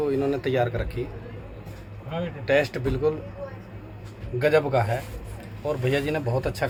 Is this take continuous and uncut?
yes; 0 cuts

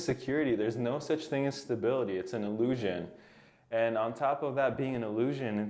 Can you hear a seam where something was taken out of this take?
no; 0 cuts

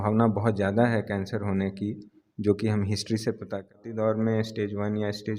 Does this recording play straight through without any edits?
no; 1 cut; at 3.9 s

